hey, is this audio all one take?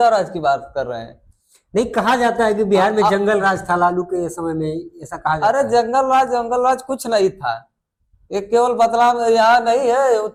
yes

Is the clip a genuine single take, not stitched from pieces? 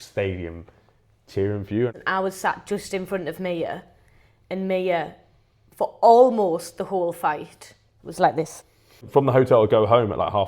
no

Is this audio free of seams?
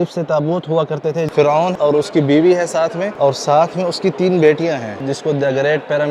no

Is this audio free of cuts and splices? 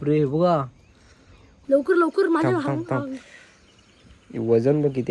no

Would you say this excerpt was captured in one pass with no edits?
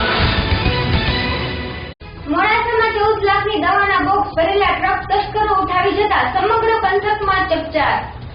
no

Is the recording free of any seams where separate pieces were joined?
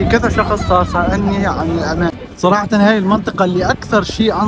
no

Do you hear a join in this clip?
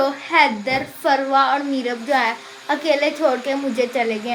no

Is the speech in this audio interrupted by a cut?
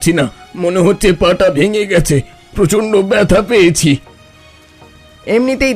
no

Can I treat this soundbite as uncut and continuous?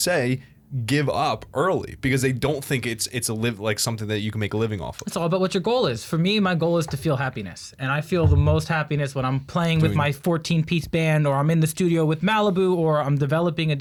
yes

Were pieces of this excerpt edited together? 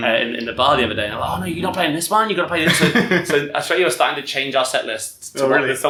no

